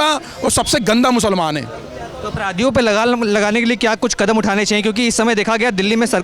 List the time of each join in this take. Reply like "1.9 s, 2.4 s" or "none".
none

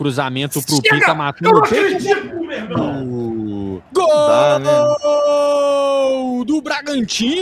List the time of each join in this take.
none

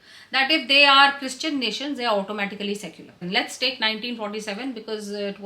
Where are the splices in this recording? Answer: 3.2 s

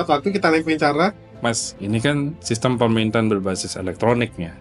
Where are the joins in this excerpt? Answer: 1.3 s

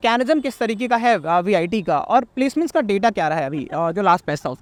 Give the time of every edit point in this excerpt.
none

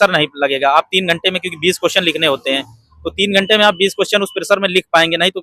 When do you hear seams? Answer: none

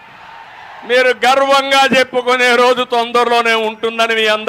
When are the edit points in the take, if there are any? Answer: none

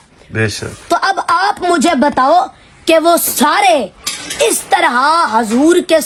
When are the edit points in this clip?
none

